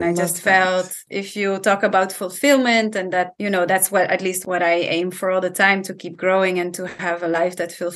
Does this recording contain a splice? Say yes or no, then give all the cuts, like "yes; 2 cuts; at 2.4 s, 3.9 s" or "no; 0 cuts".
yes; 2 cuts; at 1.0 s, 4.4 s